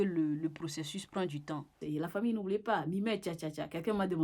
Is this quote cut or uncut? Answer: cut